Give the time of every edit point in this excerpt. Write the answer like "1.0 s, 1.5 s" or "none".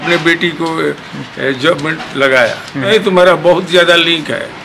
2.9 s